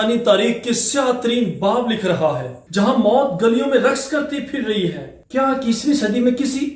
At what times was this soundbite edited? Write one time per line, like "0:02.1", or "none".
0:02.6
0:05.2